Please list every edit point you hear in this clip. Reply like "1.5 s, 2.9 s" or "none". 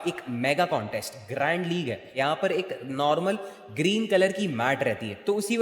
2.1 s